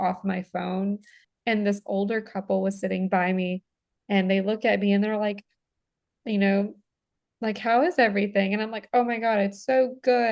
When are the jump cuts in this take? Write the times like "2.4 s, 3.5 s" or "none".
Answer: 1.3 s